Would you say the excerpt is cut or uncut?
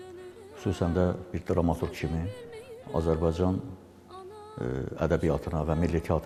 uncut